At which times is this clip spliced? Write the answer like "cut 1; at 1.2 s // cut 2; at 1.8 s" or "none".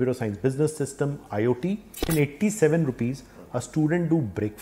cut 1; at 2.1 s